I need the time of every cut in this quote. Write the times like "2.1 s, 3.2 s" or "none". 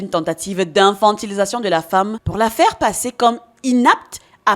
2.2 s